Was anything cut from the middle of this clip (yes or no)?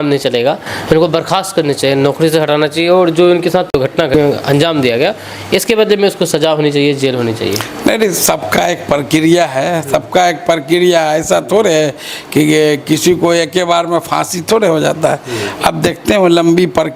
no